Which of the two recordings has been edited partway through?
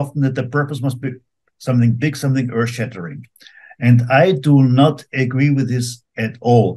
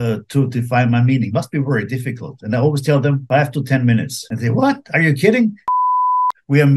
second; 3 cuts; at 3.2 s, 4.2 s, 6.0 s

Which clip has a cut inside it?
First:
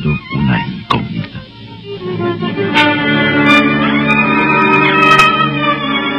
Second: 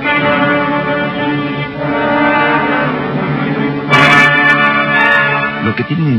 second; 1 cut; at 3.2 s

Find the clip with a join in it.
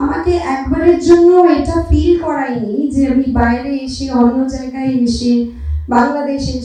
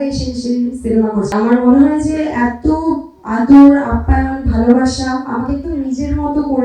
second; 1 cut; at 1.3 s

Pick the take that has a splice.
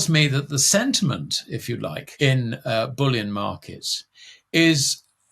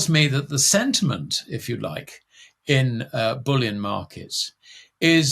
first; 1 cut; at 2.0 s

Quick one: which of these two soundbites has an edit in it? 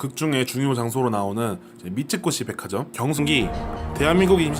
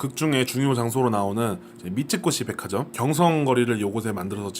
second; 1 cut; at 3.2 s

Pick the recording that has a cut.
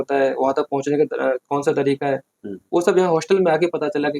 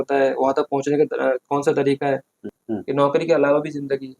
second; 1 cut; at 2.5 s

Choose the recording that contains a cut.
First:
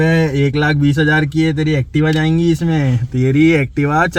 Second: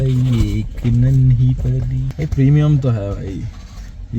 second; 1 cut; at 2.0 s

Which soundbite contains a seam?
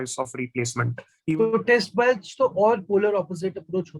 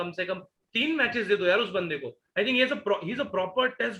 first; 1 cut; at 1.1 s

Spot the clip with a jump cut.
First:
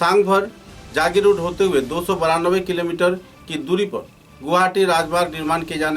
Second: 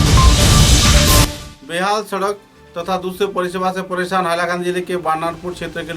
second; 1 cut; at 1.5 s

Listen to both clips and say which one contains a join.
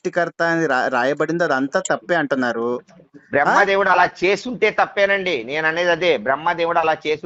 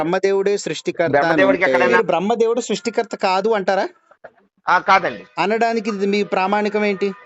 second; 1 cut; at 1.9 s

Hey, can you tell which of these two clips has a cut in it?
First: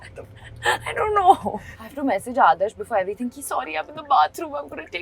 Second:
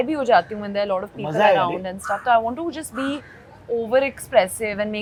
first; 1 cut; at 1.5 s

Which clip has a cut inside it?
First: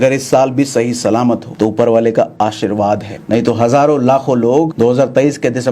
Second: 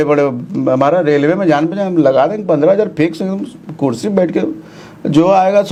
first; 3 cuts; at 1.5 s, 3.1 s, 4.7 s

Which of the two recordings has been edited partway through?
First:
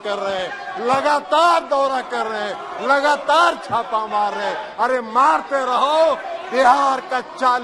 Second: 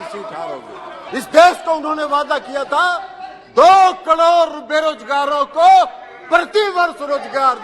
second; 1 cut; at 0.9 s

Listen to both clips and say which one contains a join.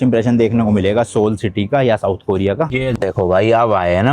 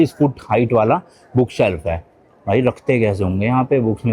first; 1 cut; at 2.8 s

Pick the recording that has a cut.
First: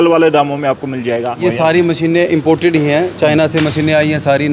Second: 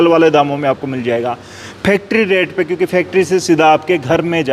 first; 1 cut; at 1.3 s

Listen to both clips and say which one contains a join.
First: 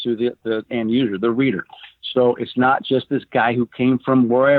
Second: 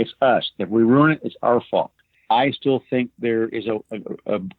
second; 1 cut; at 1.9 s

